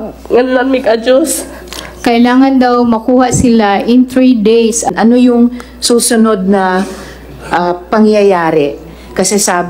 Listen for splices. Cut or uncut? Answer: cut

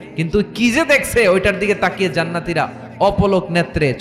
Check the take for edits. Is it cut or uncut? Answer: uncut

